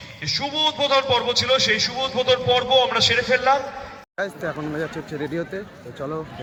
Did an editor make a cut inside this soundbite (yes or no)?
no